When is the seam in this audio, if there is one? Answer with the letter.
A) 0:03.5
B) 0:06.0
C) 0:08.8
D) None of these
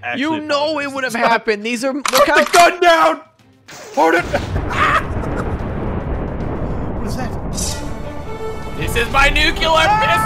D